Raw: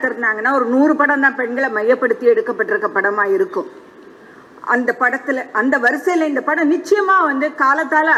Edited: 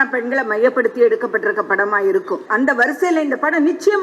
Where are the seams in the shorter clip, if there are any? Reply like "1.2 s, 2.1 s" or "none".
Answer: 2.4 s